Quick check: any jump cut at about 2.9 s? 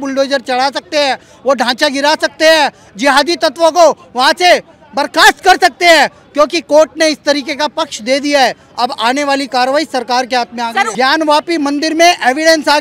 no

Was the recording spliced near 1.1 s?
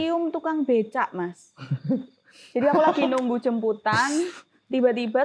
no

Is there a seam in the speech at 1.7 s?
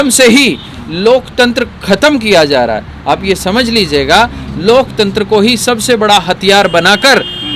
no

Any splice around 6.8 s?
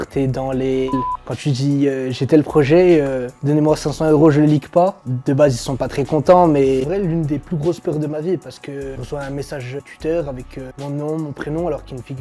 yes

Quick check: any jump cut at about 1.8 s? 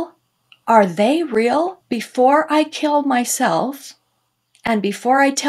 yes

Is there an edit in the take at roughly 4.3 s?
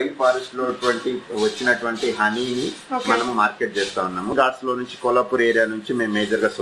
yes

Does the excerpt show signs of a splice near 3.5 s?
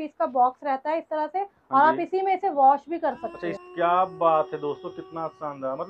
yes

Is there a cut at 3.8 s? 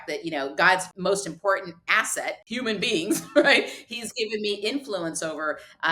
no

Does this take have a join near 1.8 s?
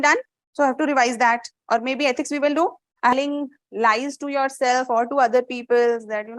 no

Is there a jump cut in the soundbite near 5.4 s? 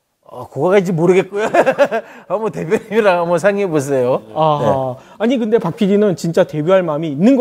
no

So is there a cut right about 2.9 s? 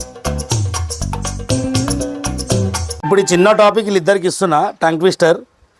yes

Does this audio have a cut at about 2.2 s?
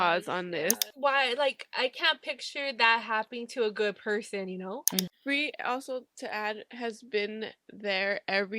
no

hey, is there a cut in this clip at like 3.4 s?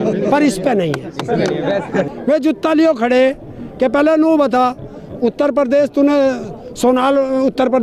no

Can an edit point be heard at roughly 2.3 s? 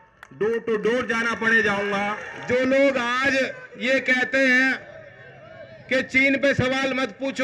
yes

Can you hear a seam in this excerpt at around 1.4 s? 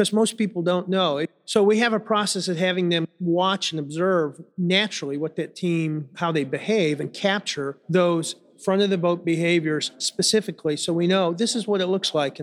yes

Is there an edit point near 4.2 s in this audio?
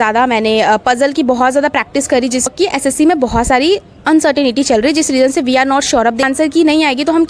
no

